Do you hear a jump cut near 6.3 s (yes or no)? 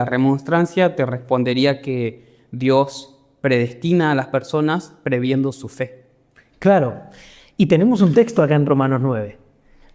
no